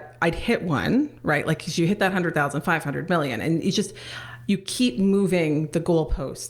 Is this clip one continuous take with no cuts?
yes; 0 cuts

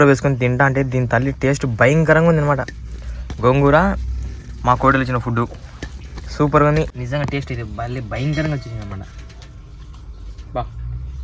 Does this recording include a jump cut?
no; 0 cuts

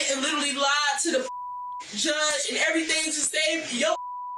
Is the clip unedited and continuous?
yes; 0 cuts

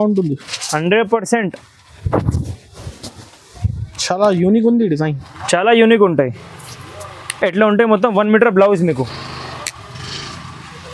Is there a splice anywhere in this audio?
yes; 1 cut; at 4.0 s

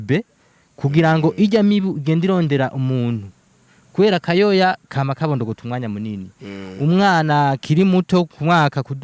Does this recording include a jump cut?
no; 0 cuts

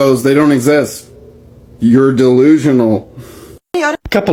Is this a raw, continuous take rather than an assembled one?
yes; 0 cuts

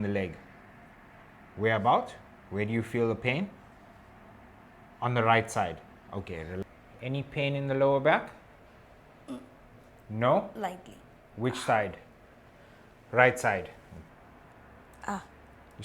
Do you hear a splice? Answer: yes; 2 cuts; at 6.6 s, 13.9 s

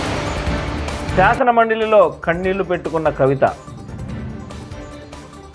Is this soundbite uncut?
no; 1 cut; at 1.1 s

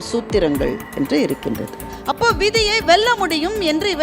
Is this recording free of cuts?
no; 1 cut; at 1.9 s

